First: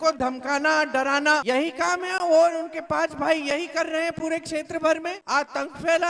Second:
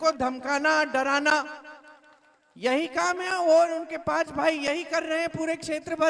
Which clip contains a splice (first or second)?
first